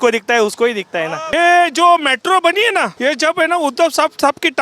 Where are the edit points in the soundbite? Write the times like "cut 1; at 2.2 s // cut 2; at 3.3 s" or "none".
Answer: cut 1; at 1.3 s // cut 2; at 2.9 s